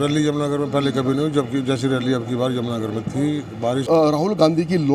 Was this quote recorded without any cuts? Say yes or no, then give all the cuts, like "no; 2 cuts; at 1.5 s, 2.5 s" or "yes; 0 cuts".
no; 1 cut; at 3.8 s